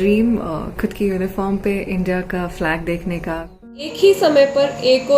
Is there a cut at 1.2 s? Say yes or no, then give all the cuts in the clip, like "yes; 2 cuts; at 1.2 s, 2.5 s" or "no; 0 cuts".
no; 1 cut; at 3.9 s